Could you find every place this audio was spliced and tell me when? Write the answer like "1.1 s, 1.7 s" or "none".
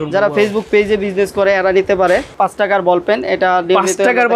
2.4 s